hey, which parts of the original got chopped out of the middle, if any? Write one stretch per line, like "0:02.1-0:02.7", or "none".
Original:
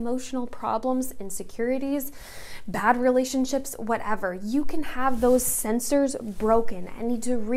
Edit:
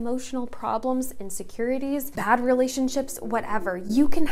0:02.1-0:02.7